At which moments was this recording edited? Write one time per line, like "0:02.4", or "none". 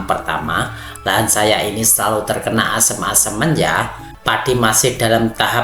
0:04.0